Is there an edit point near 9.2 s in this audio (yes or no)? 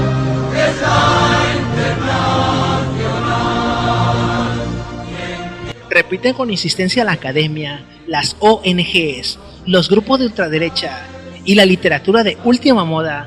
yes